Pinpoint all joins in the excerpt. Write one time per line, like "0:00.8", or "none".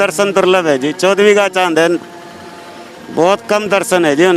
none